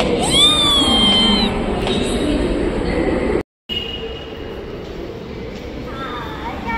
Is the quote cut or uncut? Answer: uncut